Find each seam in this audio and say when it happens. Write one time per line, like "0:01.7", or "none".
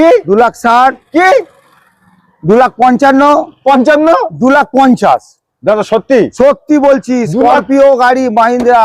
none